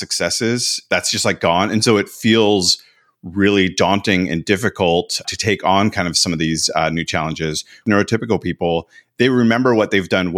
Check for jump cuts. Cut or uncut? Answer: cut